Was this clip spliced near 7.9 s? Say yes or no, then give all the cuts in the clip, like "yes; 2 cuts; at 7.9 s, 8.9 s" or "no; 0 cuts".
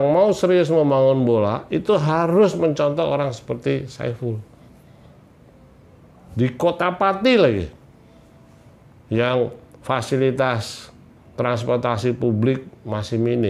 no; 0 cuts